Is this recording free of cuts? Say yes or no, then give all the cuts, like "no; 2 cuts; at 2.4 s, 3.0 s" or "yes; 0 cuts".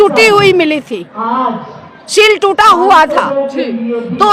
yes; 0 cuts